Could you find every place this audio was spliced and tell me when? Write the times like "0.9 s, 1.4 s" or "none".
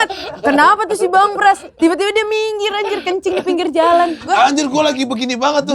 1.7 s, 4.2 s